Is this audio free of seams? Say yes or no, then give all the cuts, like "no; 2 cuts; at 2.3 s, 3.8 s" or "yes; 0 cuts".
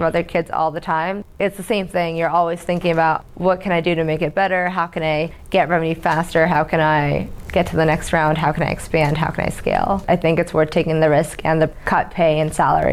no; 4 cuts; at 1.2 s, 3.2 s, 10.0 s, 11.8 s